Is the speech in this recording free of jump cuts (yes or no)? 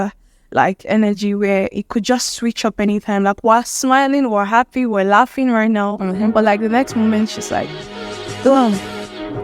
yes